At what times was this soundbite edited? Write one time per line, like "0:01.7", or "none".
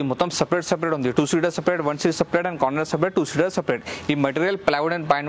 none